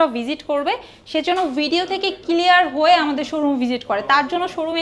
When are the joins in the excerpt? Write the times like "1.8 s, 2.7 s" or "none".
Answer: none